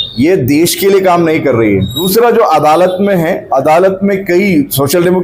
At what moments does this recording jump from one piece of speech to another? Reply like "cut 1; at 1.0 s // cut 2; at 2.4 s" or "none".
cut 1; at 2.0 s